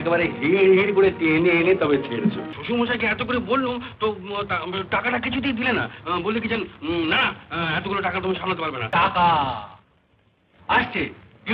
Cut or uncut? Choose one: cut